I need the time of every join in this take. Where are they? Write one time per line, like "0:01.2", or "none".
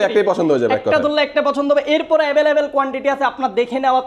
none